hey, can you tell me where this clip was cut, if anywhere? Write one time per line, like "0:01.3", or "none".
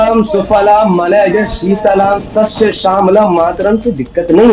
none